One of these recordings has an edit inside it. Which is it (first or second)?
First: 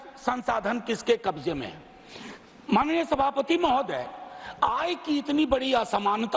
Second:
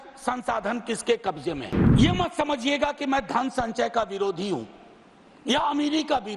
second